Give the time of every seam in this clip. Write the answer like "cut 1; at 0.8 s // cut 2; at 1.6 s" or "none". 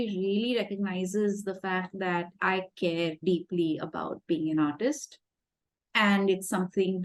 none